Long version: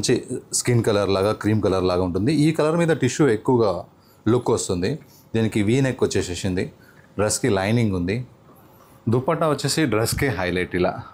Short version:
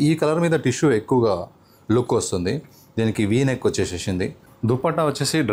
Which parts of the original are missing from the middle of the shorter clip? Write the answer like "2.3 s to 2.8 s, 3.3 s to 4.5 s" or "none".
6.8 s to 8.9 s